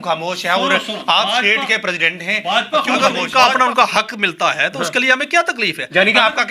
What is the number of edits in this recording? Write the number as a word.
one